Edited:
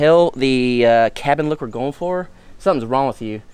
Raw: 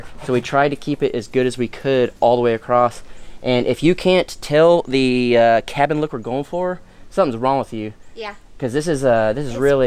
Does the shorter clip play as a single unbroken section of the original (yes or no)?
yes